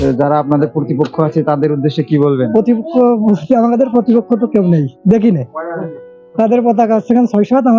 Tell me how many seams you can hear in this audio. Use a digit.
0